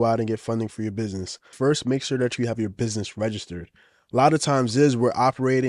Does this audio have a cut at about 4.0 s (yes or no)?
no